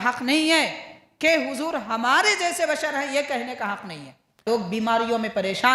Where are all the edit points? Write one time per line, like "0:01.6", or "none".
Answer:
0:04.4